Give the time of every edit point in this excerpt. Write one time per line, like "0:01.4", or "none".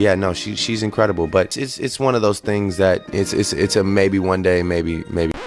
none